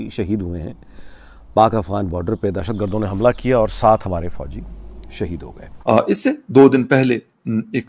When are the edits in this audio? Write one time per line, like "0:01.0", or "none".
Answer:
0:05.6